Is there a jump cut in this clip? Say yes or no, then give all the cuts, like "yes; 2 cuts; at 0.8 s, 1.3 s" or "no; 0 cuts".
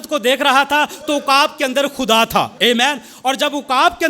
yes; 1 cut; at 2.5 s